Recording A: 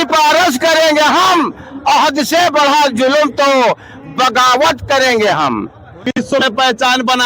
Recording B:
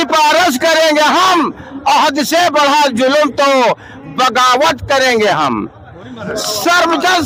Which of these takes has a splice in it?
A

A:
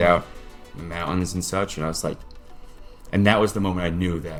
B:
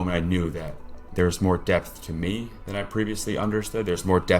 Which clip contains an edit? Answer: B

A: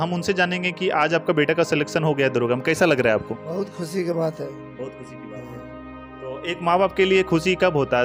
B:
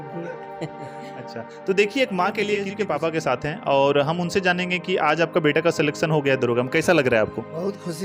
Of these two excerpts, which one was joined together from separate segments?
B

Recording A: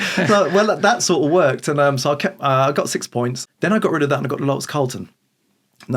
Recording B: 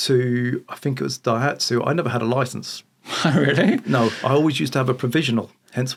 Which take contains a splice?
A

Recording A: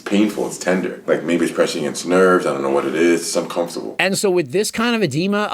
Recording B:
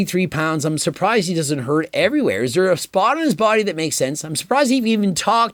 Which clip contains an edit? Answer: A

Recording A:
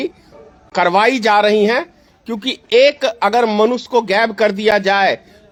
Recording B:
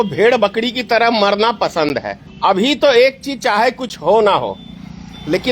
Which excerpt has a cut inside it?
B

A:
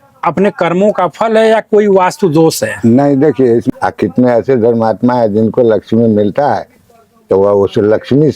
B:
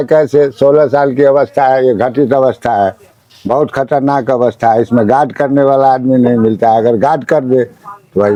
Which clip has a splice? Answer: A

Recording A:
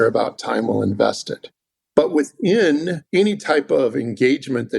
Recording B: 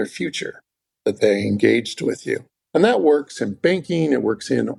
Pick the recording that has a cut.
A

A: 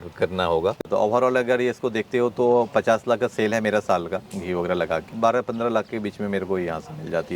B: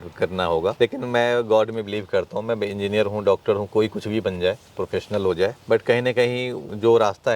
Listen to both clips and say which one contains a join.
A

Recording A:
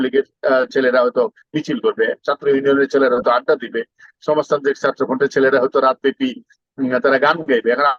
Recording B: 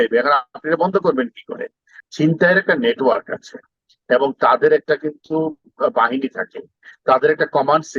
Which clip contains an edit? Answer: B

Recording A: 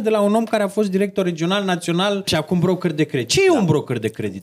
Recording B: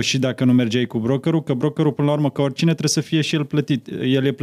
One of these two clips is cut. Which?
A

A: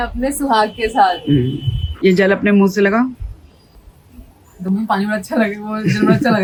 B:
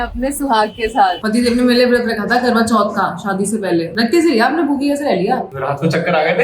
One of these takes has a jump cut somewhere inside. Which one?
B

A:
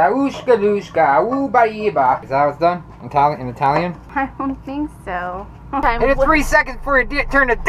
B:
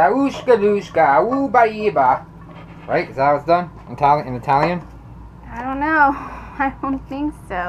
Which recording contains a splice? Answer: A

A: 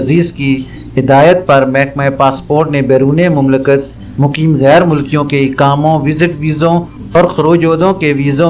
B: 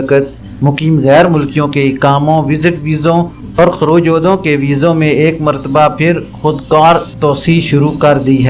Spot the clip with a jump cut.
B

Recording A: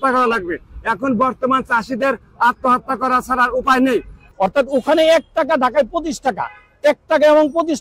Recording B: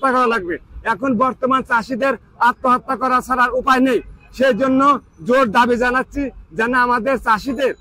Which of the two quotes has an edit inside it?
A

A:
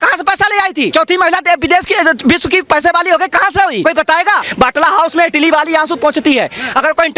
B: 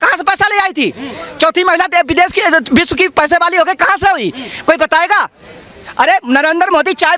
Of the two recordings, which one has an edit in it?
A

